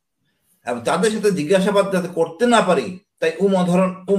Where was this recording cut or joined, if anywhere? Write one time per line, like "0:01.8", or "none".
none